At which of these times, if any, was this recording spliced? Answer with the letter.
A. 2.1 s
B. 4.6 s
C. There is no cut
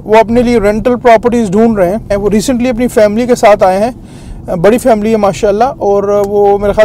A